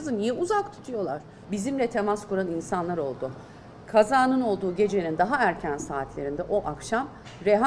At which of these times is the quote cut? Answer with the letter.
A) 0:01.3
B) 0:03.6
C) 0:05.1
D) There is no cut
A